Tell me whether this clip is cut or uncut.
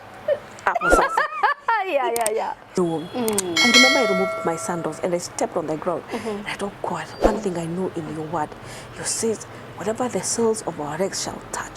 cut